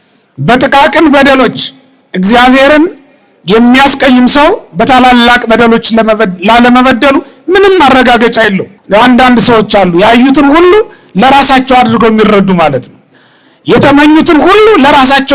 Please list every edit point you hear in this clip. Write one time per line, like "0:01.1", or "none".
0:08.7

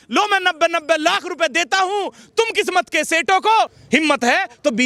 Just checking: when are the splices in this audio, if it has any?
0:03.8

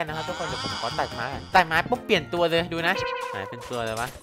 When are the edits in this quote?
none

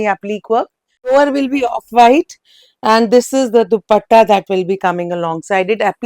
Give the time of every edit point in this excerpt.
0:01.1

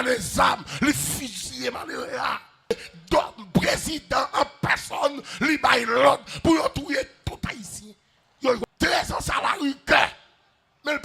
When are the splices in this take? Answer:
0:02.7
0:08.6

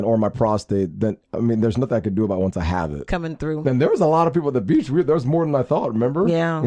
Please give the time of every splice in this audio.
0:03.1

